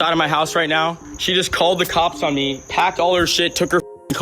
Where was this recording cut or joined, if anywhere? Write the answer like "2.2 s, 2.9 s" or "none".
1.1 s